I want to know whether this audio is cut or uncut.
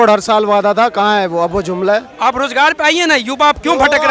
cut